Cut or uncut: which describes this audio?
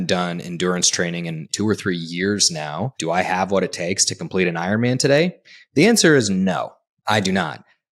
cut